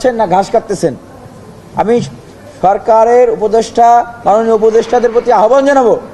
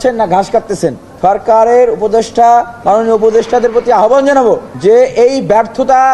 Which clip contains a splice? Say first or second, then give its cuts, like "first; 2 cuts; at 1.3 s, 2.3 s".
second; 2 cuts; at 1.1 s, 4.7 s